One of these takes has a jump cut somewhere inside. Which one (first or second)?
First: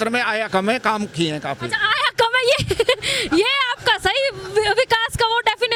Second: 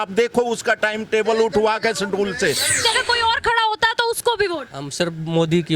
second